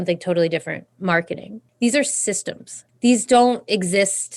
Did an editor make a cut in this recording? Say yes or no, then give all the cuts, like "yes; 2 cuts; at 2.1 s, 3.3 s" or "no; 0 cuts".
yes; 2 cuts; at 1.6 s, 2.8 s